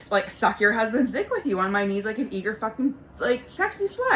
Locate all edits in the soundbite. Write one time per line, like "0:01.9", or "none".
none